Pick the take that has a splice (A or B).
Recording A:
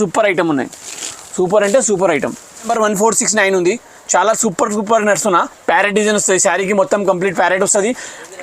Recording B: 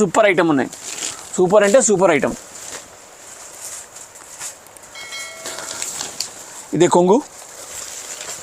A